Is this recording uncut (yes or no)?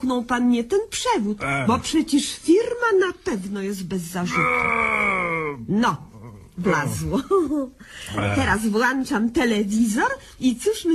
no